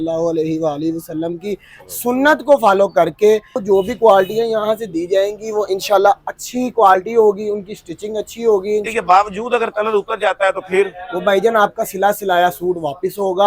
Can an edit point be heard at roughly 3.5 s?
yes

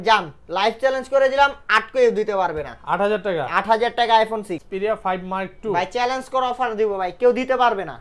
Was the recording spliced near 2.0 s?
no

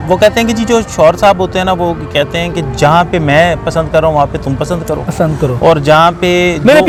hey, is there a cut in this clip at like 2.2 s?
no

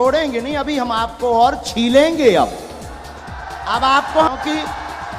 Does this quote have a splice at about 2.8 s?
no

